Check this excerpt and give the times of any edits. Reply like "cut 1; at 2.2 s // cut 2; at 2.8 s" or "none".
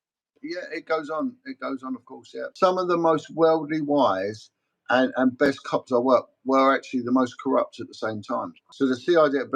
cut 1; at 2.4 s // cut 2; at 8.6 s